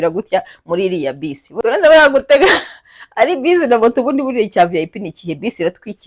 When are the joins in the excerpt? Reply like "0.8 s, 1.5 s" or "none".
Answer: 1.5 s